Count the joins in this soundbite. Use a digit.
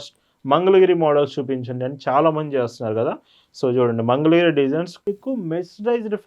1